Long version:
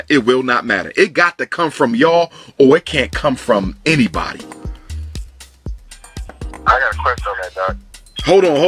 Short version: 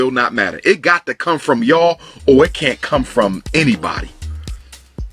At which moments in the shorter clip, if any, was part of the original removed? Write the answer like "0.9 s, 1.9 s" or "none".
4.1 s